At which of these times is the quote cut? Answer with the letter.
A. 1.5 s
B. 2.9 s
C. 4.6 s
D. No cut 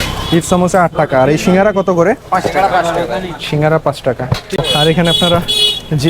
C